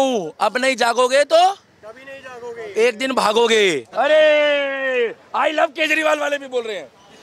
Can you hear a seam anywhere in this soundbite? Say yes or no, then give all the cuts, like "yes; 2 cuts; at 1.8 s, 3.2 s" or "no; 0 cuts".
yes; 1 cut; at 3.9 s